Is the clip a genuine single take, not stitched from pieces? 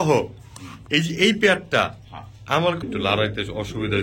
no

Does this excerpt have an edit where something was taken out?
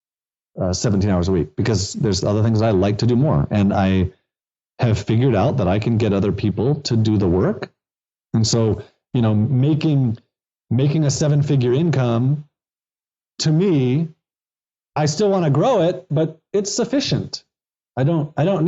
yes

